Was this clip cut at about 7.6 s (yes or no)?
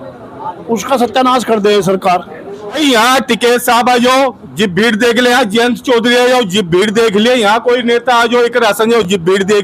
no